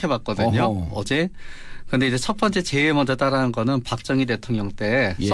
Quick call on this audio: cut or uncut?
uncut